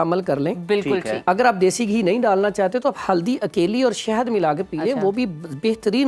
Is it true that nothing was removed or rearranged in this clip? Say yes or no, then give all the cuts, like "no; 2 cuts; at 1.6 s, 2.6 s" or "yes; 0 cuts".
yes; 0 cuts